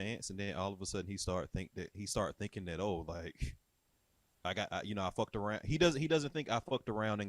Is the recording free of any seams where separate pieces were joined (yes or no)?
yes